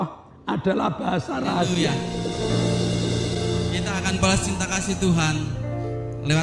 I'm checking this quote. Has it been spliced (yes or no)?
yes